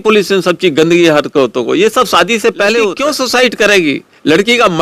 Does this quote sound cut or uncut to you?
cut